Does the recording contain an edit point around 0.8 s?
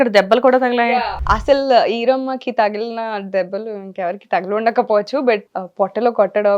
yes; 2 cuts; at 0.8 s, 5.6 s

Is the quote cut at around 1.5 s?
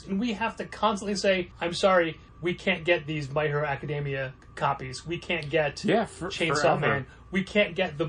yes; 3 cuts; at 1.5 s, 2.2 s, 4.4 s

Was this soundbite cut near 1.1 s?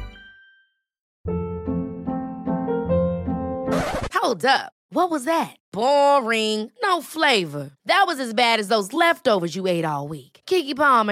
yes; 1 cut; at 1.1 s

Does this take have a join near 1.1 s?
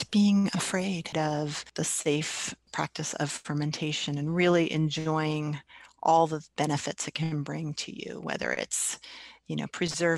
yes; 1 cut; at 1.1 s

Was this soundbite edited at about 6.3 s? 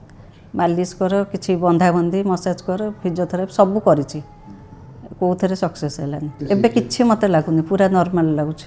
yes; 1 cut; at 6.3 s

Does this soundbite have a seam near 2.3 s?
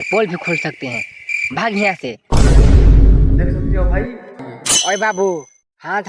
no; 1 cut; at 4.5 s

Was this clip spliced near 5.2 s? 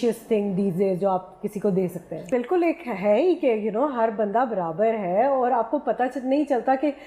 no; 1 cut; at 2.3 s

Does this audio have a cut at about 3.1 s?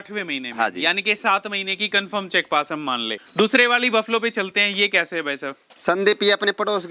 yes; 1 cut; at 3.1 s

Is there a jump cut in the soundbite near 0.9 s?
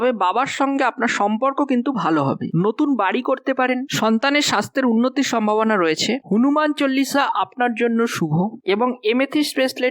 no; 2 cuts; at 2.5 s, 6.2 s

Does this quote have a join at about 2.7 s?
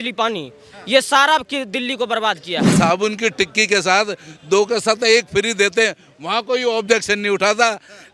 yes; 1 cut; at 2.7 s

